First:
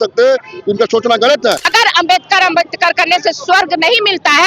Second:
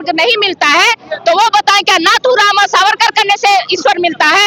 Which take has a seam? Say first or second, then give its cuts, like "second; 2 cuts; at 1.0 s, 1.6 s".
first; 1 cut; at 1.6 s